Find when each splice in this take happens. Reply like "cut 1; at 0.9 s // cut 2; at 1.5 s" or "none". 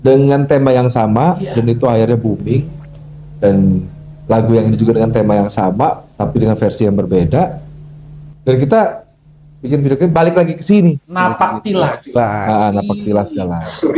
none